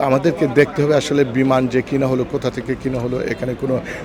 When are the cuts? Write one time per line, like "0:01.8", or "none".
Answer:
none